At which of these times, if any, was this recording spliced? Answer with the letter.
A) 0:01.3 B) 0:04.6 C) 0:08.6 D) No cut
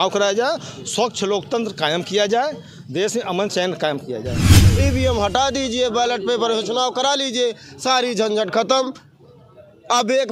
B